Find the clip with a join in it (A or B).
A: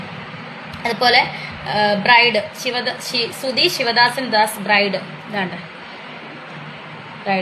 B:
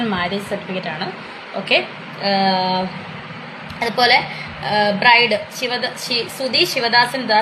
B